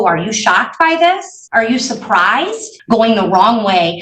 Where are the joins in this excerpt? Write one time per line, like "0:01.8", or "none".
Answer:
0:01.3
0:02.7